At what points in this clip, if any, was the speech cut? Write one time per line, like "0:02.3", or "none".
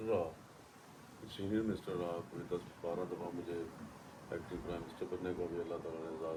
none